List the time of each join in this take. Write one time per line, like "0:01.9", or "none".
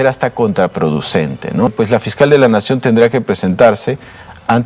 0:01.7